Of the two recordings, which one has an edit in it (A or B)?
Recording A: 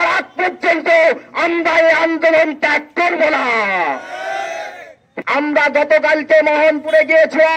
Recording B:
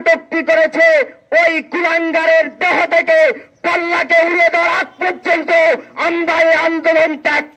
A